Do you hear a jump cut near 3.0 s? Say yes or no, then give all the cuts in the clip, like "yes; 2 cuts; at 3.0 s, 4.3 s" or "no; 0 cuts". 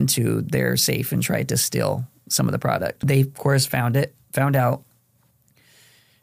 yes; 1 cut; at 3.0 s